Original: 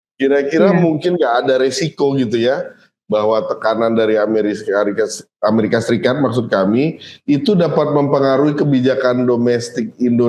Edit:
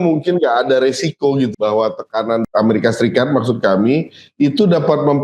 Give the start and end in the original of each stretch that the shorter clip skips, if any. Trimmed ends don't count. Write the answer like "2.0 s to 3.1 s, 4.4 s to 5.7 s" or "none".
2.3 s to 3.0 s, 3.9 s to 5.3 s